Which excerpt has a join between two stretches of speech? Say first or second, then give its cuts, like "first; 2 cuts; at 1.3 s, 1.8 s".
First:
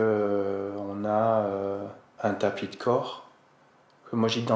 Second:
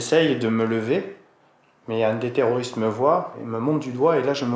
second; 1 cut; at 3.4 s